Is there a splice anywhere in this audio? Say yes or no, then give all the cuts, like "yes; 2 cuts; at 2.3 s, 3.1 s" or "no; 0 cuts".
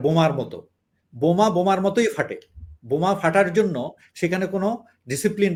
no; 0 cuts